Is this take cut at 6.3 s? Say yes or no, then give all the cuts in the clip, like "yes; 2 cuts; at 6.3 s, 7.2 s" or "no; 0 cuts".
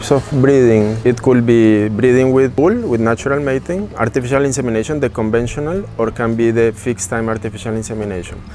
no; 3 cuts; at 1.0 s, 2.5 s, 3.9 s